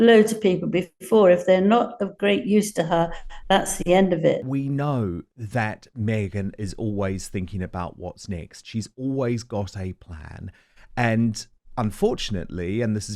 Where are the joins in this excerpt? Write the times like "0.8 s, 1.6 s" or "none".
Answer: 4.4 s